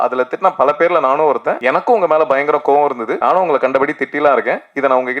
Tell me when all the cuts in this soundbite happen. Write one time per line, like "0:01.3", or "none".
0:01.5
0:03.1